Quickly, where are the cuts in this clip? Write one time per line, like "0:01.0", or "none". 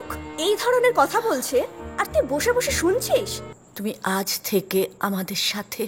0:03.4